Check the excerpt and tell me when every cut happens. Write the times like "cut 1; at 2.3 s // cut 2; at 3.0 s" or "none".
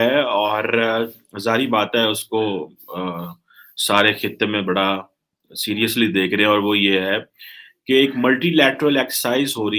none